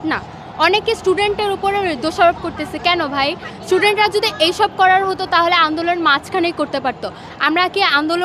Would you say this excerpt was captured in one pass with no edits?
yes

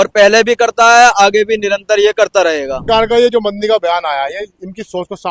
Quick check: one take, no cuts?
no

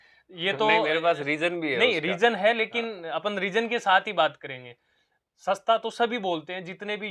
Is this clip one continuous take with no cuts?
yes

